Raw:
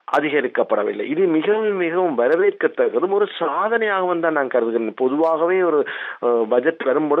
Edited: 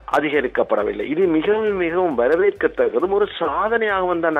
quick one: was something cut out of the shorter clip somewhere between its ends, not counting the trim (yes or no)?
no